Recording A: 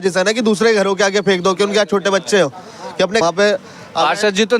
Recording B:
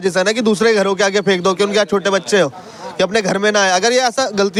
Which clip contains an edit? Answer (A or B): A